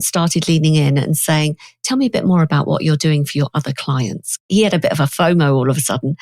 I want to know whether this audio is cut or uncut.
cut